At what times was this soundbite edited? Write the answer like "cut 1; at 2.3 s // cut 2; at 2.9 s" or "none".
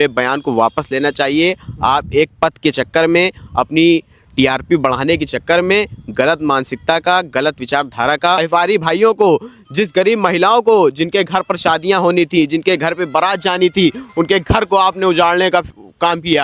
cut 1; at 8.4 s